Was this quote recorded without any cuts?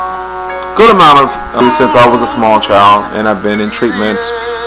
yes; 0 cuts

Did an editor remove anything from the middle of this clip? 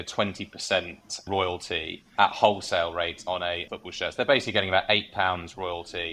yes; 2 cuts; at 2.0 s, 3.7 s

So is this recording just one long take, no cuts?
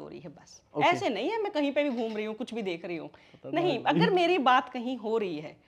yes; 0 cuts

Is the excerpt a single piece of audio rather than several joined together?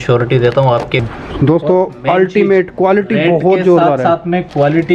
no; 1 cut; at 1.0 s

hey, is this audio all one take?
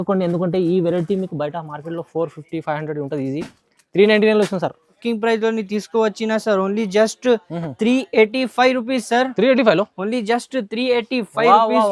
no; 1 cut; at 5.0 s

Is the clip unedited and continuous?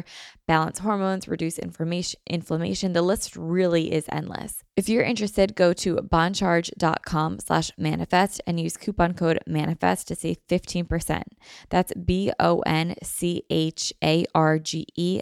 no; 1 cut; at 4.6 s

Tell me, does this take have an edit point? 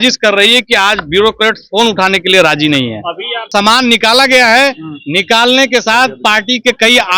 yes; 1 cut; at 3.5 s

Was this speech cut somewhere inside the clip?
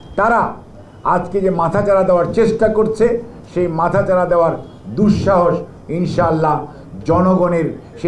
no; 0 cuts

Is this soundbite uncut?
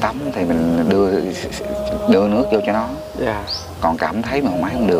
yes; 0 cuts

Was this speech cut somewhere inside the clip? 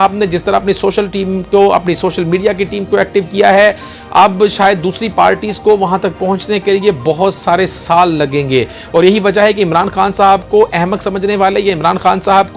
no; 0 cuts

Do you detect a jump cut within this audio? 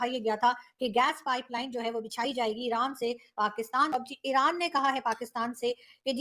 yes; 1 cut; at 3.9 s

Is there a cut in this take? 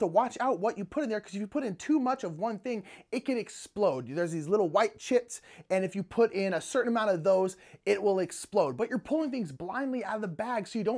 no; 0 cuts

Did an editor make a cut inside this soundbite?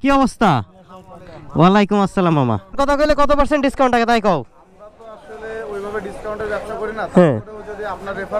yes; 1 cut; at 2.8 s

